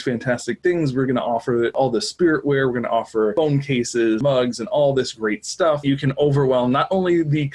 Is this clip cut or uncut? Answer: cut